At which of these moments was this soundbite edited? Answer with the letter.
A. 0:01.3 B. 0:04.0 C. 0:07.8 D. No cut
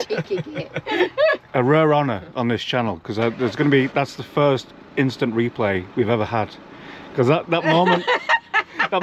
A